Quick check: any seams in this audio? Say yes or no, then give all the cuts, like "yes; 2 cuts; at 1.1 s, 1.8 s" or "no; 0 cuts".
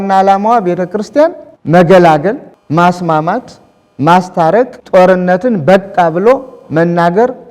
yes; 3 cuts; at 1.5 s, 2.5 s, 4.8 s